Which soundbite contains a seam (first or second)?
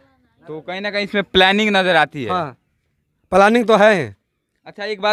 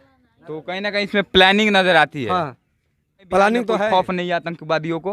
second